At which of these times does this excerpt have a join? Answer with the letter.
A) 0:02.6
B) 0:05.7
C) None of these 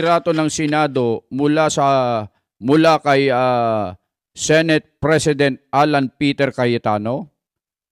C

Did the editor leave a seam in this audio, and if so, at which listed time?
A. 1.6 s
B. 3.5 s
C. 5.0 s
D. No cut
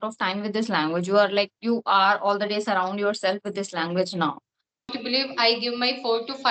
C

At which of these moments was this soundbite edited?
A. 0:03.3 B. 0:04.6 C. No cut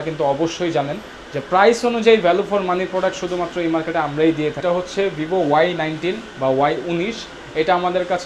B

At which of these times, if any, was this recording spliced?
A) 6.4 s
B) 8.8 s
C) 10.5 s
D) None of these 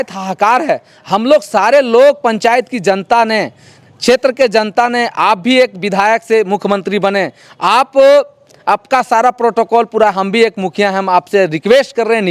D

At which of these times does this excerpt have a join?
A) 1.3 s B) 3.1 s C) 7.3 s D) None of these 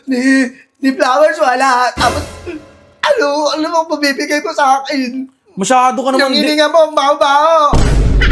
D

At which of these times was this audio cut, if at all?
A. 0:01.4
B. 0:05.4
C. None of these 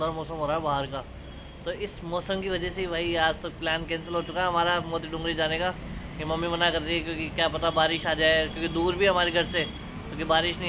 C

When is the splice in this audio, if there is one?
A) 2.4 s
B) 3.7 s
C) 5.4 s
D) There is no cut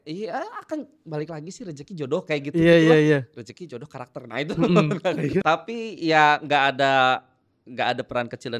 C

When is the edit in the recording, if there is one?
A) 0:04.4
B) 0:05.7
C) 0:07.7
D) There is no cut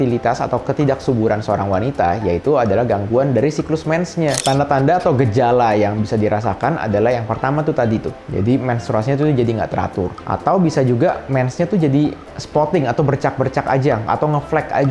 A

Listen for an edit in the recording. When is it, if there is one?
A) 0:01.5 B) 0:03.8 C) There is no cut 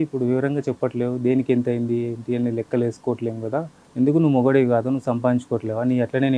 B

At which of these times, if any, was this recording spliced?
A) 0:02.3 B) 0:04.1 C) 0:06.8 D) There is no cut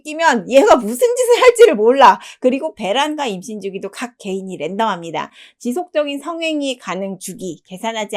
D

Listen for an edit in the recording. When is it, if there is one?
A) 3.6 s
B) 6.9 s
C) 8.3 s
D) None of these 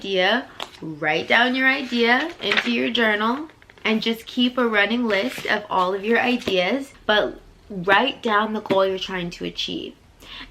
B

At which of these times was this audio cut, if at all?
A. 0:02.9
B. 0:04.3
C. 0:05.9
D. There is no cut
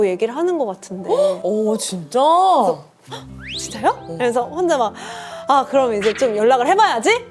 D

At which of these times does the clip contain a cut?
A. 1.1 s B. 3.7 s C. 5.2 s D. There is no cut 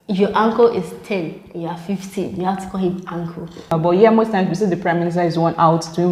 B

